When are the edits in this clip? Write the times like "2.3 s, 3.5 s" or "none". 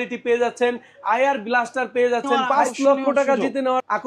2.3 s

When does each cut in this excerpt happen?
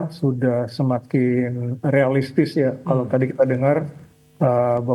none

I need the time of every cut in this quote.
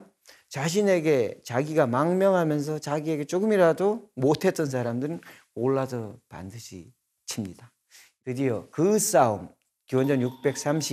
8.0 s

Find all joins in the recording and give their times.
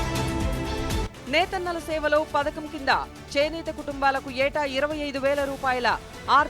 1.0 s

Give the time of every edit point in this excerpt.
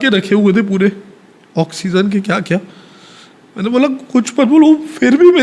none

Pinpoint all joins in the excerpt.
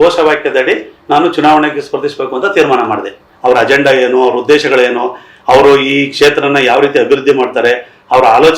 3.2 s

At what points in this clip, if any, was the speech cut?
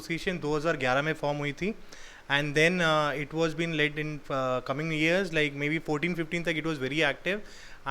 none

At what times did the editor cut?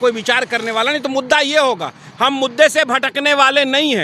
none

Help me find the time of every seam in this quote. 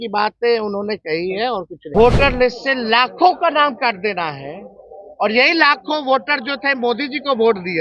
2.0 s

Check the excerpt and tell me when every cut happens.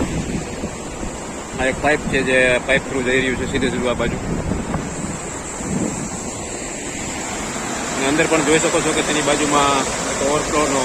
none

